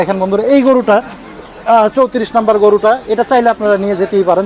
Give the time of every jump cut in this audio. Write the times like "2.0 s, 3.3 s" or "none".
none

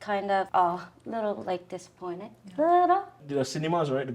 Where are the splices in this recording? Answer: 3.1 s

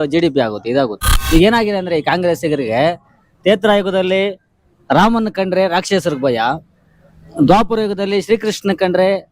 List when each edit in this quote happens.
1.1 s

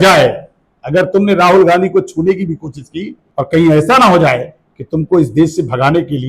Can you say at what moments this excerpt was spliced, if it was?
3.2 s

